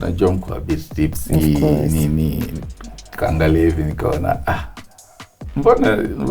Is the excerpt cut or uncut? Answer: uncut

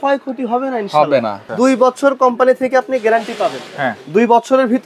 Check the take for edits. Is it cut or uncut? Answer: cut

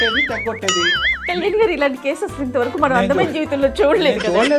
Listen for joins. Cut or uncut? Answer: uncut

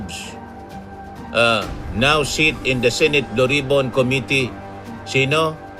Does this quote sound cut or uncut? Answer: uncut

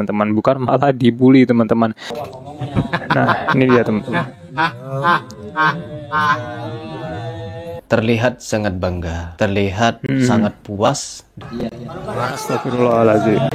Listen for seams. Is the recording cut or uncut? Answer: cut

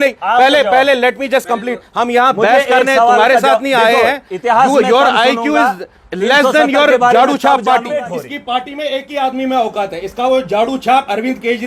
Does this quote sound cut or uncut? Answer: cut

